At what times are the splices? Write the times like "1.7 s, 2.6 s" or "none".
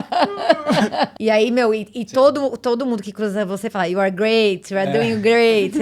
1.1 s